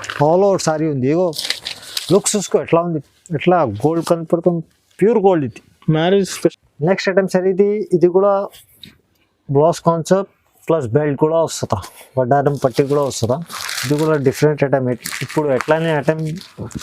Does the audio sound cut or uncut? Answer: cut